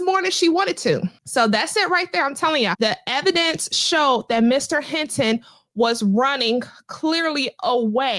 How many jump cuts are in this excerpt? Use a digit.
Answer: 2